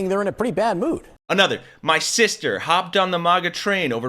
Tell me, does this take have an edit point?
yes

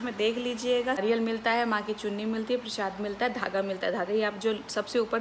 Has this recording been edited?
yes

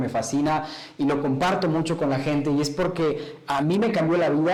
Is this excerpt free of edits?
yes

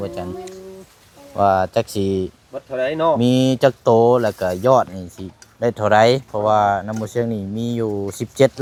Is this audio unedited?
yes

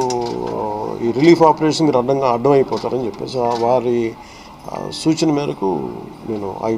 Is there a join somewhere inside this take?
no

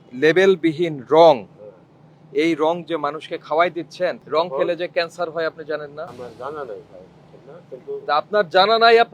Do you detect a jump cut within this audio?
yes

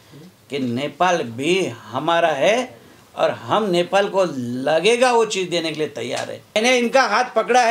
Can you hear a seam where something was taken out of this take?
yes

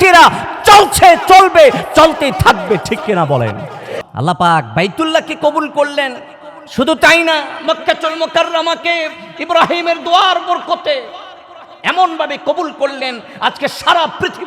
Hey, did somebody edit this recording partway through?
yes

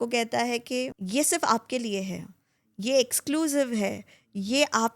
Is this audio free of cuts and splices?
no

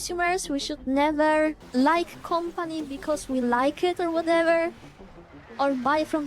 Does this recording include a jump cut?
yes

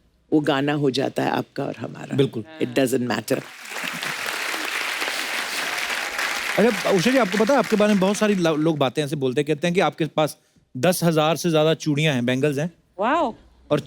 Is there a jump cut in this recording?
no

